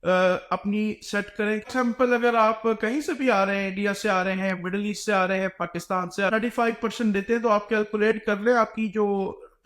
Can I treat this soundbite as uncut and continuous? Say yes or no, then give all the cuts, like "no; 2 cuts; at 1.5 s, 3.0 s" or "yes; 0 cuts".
no; 2 cuts; at 1.6 s, 6.3 s